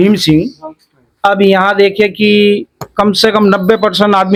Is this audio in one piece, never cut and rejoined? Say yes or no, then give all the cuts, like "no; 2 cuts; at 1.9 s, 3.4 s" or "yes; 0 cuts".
yes; 0 cuts